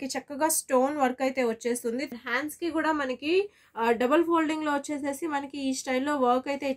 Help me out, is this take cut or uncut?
cut